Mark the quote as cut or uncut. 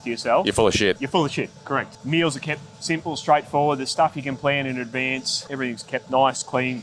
cut